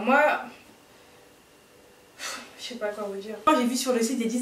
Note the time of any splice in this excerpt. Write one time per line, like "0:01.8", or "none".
0:03.4